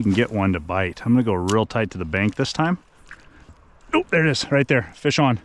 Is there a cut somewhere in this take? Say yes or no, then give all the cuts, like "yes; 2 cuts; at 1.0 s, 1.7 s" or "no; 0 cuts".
yes; 1 cut; at 3.5 s